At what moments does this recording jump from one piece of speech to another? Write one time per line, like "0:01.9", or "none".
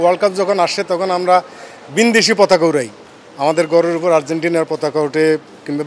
none